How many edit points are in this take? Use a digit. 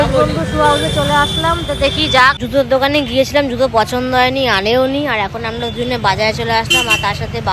1